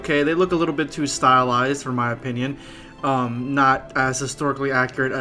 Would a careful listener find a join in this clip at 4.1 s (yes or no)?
yes